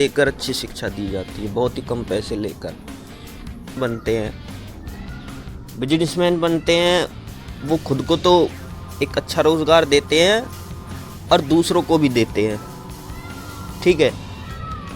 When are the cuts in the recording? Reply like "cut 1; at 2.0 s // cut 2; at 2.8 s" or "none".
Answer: cut 1; at 3.8 s